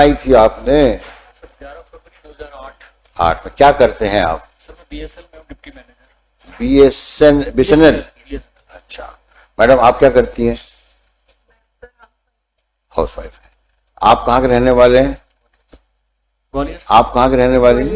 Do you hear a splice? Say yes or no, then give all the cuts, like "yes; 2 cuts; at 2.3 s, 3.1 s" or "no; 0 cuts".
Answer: no; 0 cuts